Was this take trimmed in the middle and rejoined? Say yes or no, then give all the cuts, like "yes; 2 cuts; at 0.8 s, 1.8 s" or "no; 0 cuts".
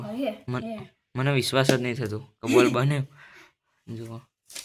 no; 0 cuts